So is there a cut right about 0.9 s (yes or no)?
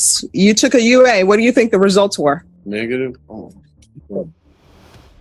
no